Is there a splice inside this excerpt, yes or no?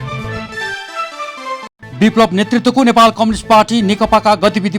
no